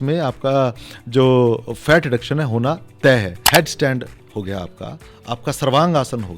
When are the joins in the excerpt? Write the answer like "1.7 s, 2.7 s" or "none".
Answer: 3.4 s